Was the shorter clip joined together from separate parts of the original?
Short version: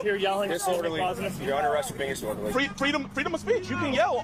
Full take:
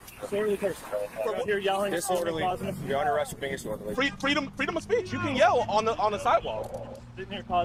no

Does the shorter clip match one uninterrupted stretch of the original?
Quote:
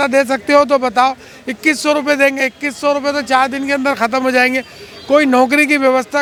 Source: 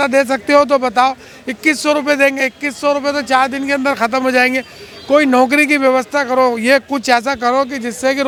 yes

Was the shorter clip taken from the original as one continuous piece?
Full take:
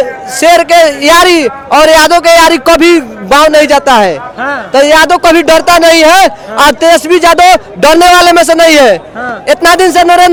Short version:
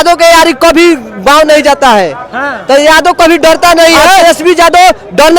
no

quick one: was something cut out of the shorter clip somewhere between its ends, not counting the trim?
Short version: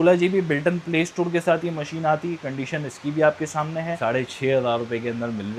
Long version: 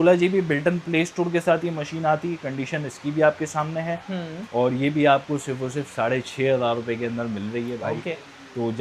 yes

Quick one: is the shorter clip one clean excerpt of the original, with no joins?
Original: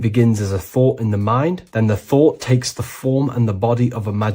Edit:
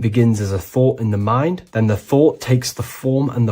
yes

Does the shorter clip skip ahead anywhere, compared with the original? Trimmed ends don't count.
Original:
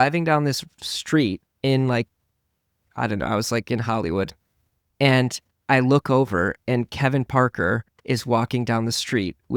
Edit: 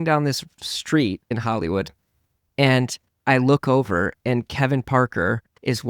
yes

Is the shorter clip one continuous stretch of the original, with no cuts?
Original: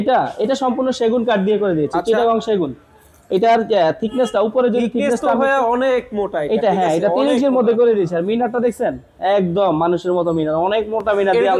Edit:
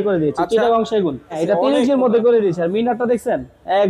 no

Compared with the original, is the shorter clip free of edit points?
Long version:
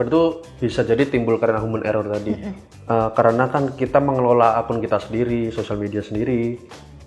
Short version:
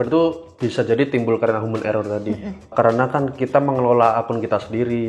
no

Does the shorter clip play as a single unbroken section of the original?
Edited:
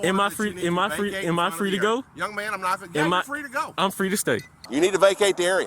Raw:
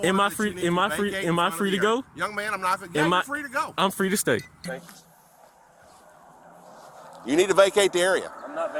no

